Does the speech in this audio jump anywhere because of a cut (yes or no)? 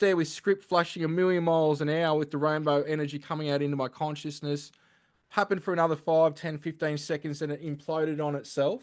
no